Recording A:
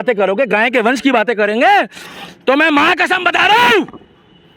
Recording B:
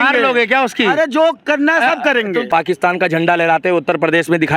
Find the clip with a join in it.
B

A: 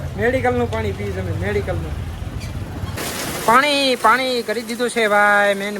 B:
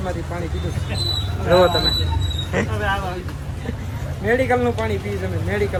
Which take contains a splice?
A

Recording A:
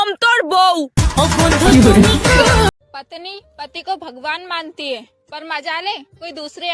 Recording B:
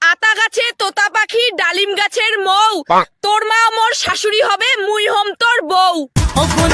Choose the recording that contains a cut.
A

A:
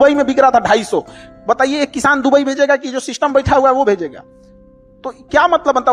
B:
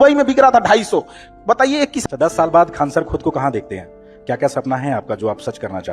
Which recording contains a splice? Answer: B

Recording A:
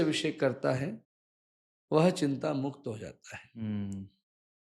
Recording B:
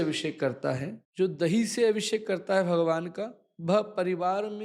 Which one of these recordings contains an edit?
B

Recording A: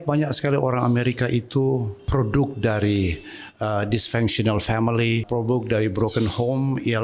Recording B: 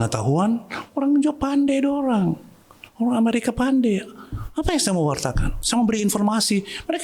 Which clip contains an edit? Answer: A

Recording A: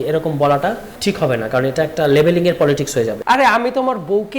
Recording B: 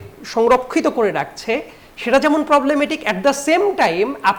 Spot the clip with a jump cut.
A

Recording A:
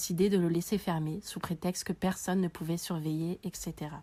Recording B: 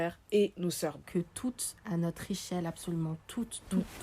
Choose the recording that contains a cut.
B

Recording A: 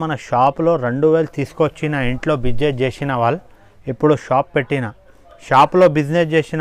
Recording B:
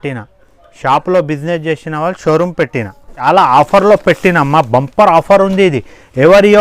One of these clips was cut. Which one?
B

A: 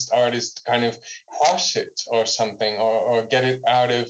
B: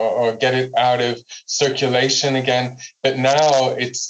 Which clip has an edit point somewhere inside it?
A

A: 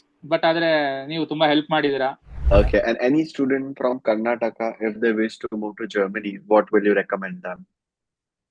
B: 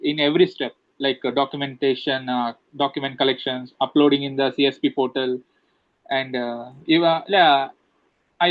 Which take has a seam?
A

